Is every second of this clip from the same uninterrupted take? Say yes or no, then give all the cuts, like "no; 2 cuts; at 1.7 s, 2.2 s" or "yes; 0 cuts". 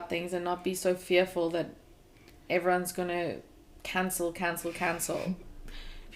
yes; 0 cuts